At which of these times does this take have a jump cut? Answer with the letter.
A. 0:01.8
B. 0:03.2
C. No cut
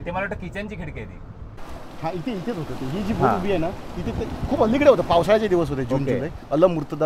A